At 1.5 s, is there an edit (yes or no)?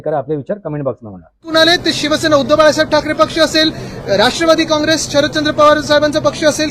yes